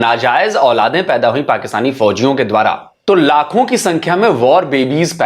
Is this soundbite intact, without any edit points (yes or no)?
no